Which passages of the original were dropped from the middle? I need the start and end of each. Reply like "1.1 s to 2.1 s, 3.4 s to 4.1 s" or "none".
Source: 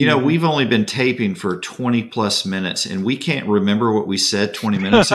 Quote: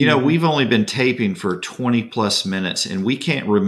none